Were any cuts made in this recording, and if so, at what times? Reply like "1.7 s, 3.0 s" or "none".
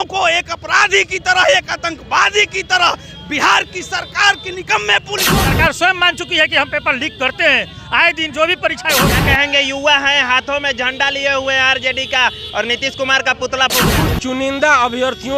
5.3 s, 9.1 s, 13.8 s